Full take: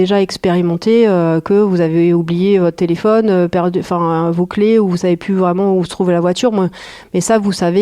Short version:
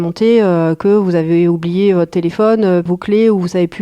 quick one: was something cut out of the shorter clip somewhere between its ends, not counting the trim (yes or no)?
yes